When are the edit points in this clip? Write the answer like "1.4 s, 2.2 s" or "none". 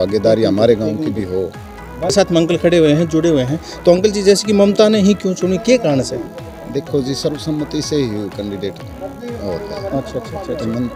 none